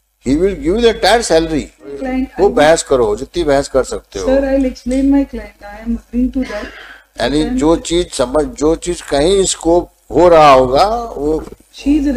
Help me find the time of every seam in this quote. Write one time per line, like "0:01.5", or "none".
0:02.1